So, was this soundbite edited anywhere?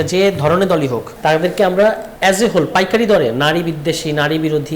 yes; 2 cuts; at 1.1 s, 2.1 s

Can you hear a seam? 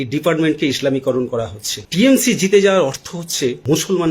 yes; 1 cut; at 1.8 s

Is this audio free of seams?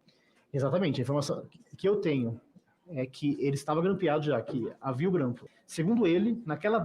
no; 1 cut; at 5.4 s

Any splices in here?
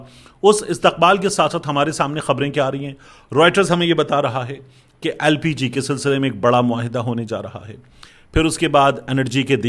no; 0 cuts

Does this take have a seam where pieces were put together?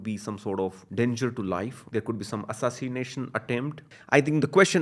yes; 3 cuts; at 0.8 s, 1.8 s, 3.9 s

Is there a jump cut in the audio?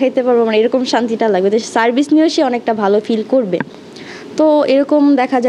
no; 0 cuts

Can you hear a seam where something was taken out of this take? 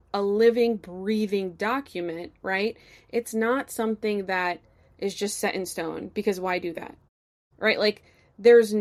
no; 0 cuts

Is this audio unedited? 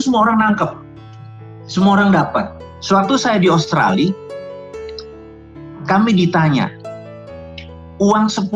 no; 1 cut; at 2.6 s

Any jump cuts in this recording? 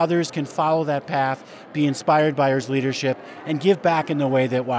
no; 0 cuts

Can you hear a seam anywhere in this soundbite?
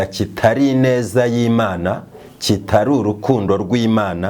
no; 0 cuts

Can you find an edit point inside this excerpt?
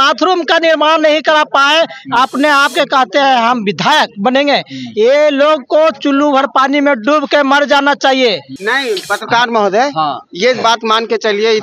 yes; 1 cut; at 8.5 s

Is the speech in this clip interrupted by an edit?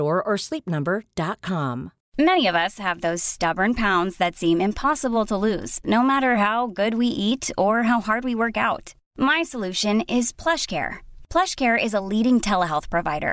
yes; 1 cut; at 2.0 s

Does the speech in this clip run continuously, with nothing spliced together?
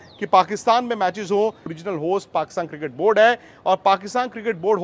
no; 1 cut; at 1.7 s

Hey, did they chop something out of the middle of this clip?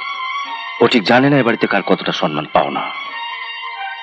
no; 0 cuts

